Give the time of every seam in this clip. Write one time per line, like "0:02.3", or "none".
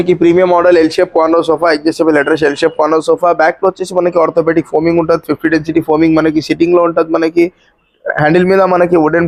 none